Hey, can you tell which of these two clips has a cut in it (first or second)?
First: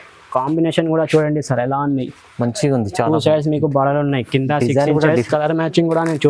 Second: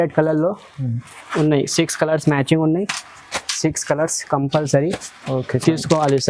first